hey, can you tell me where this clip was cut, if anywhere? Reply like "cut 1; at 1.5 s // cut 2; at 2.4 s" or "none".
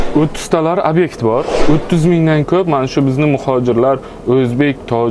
cut 1; at 1.6 s

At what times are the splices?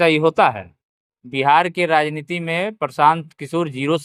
none

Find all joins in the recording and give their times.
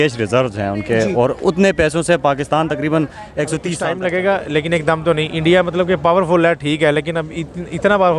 cut 1; at 3.7 s

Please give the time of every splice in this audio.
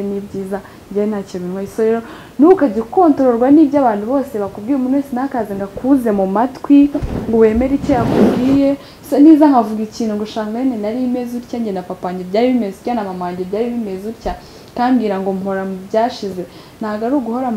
cut 1; at 8.9 s

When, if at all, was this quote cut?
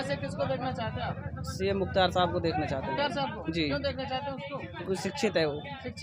none

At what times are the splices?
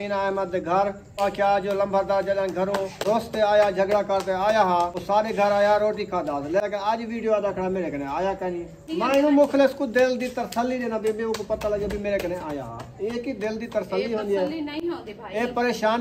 cut 1; at 1.2 s // cut 2; at 3.0 s // cut 3; at 5.0 s // cut 4; at 6.6 s // cut 5; at 8.8 s

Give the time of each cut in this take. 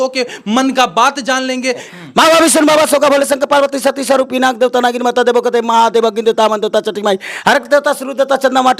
cut 1; at 1.9 s

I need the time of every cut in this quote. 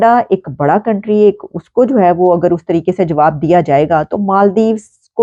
none

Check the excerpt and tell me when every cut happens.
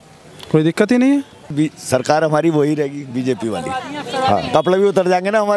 cut 1; at 1.4 s // cut 2; at 4.5 s

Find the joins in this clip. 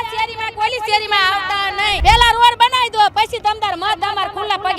cut 1; at 2.0 s

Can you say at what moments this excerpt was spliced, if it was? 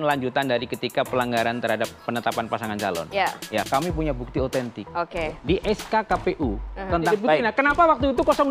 cut 1; at 3.7 s // cut 2; at 7.1 s

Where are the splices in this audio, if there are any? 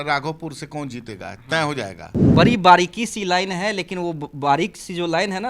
cut 1; at 2.3 s

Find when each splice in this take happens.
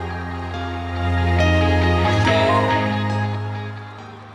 none

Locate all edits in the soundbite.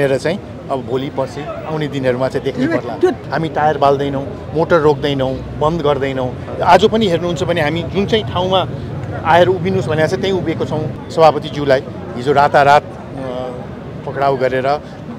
cut 1; at 3.2 s // cut 2; at 11.0 s

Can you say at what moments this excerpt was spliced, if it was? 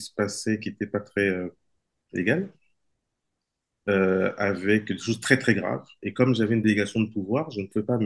none

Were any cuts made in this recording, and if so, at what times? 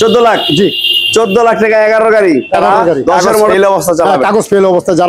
cut 1; at 3.5 s

